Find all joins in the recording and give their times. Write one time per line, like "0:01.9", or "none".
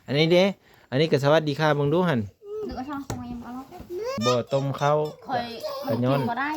0:04.2